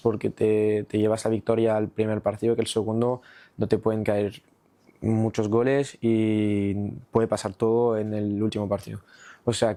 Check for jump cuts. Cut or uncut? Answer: uncut